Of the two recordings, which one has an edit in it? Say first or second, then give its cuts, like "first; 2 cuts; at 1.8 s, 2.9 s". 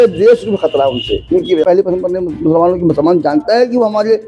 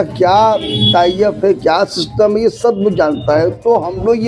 first; 1 cut; at 1.6 s